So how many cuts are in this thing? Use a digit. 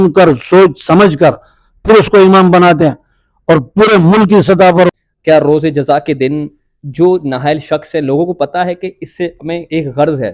1